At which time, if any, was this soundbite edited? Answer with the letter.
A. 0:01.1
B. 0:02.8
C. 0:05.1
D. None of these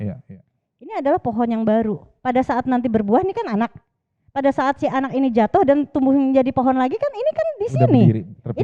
D